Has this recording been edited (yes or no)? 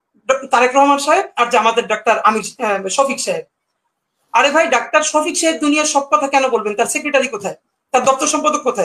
no